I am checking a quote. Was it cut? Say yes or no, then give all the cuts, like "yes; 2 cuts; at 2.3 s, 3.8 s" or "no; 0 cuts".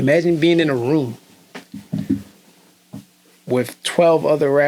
no; 0 cuts